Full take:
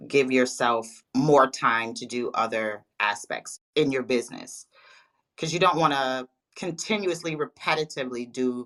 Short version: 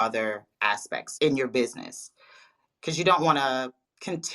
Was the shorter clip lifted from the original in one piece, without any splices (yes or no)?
no